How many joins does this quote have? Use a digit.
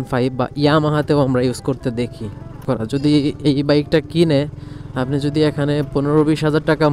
1